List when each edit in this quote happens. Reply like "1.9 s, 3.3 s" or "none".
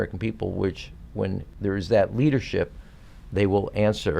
1.5 s

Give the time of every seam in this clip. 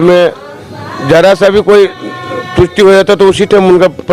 none

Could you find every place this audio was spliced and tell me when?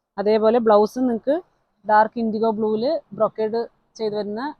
none

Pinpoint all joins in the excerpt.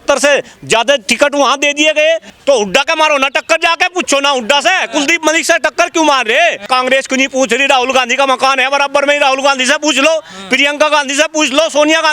2.3 s, 6.6 s

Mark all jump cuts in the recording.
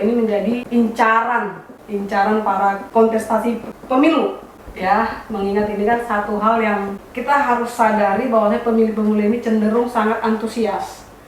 none

